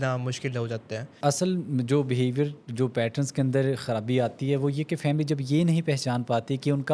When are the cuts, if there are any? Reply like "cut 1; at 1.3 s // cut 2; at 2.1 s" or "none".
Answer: cut 1; at 1.1 s